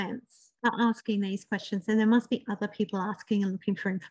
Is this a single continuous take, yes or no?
yes